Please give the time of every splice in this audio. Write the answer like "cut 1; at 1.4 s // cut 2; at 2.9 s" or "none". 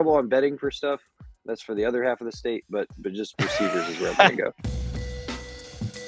cut 1; at 4.6 s